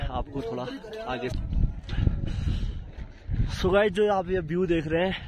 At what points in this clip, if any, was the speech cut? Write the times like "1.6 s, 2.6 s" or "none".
1.3 s

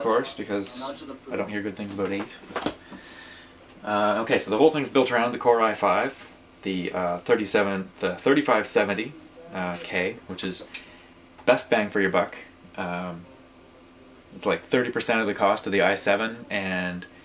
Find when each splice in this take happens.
7.9 s

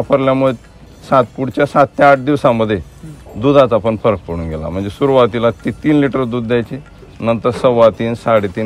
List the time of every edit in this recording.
none

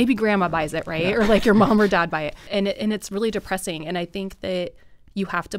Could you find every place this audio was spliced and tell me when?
2.5 s

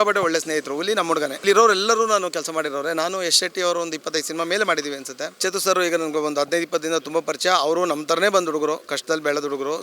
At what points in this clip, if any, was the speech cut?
1.4 s, 5.4 s

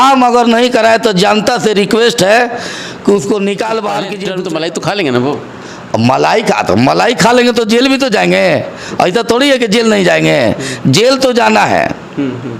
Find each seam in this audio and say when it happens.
4.2 s

